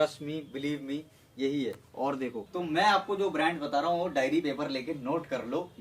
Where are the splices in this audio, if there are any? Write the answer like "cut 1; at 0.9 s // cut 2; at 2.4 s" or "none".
cut 1; at 2.4 s